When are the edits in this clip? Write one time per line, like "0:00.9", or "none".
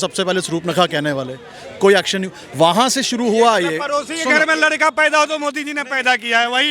none

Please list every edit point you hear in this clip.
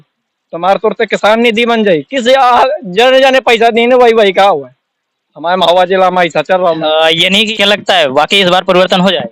0:07.5

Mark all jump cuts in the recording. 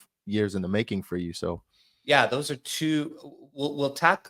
none

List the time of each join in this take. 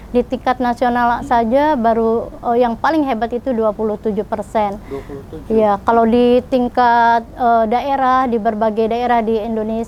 none

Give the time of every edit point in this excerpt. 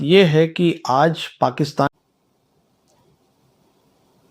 0:01.9

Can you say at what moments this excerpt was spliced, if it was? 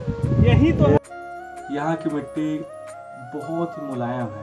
0:01.0

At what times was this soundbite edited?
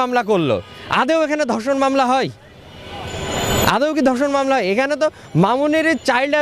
none

